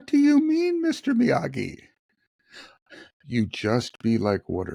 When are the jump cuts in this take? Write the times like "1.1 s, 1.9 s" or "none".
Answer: none